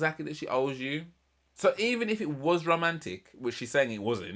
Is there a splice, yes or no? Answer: no